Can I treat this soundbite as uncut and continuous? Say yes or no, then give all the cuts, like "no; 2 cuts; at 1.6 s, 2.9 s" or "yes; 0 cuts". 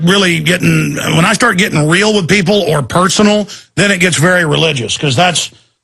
no; 1 cut; at 1.0 s